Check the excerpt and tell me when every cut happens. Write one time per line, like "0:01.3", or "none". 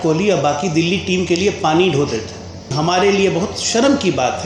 0:02.7